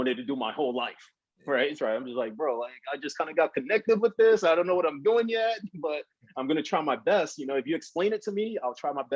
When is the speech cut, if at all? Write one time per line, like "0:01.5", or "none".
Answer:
0:01.8